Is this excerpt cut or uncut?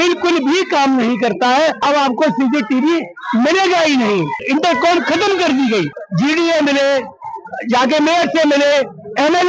cut